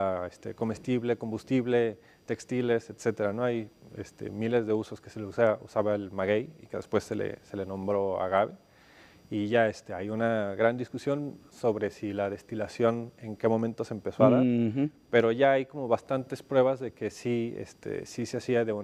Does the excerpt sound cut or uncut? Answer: cut